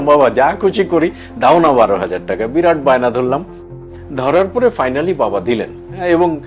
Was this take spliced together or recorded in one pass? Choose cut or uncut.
uncut